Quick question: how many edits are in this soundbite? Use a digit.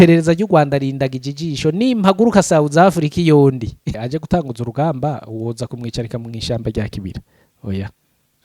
1